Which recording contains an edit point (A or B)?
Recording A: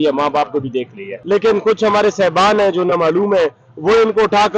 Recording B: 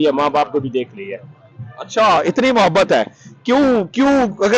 A